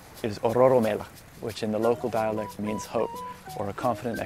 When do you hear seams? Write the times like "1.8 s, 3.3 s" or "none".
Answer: none